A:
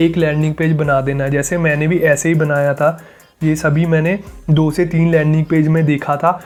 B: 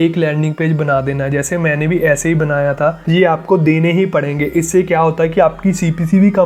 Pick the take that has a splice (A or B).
B